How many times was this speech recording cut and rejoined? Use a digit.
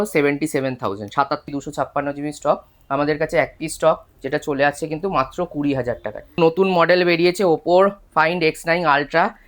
2